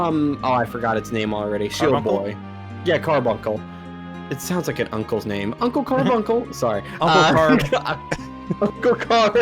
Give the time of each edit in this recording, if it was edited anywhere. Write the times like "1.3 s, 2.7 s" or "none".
none